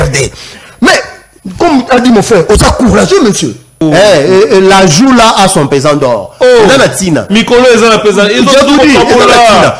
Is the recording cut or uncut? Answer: cut